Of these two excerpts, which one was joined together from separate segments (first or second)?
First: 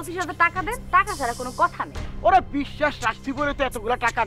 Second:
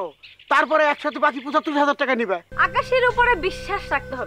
second